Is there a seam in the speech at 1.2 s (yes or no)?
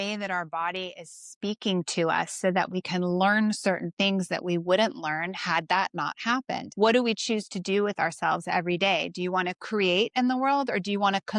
no